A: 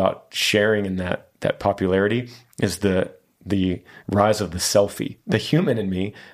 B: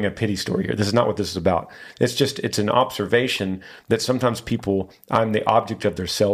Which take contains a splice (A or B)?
A